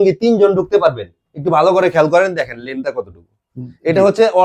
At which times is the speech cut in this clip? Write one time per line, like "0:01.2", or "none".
none